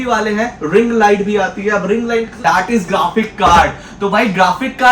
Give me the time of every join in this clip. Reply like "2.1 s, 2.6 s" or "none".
2.4 s